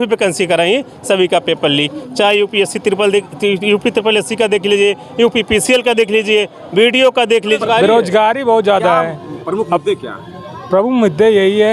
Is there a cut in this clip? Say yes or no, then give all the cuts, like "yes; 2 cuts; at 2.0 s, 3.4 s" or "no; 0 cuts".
yes; 1 cut; at 7.6 s